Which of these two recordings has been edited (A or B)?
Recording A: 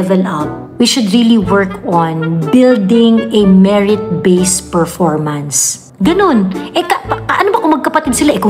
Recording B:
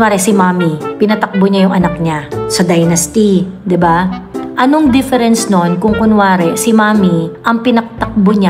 B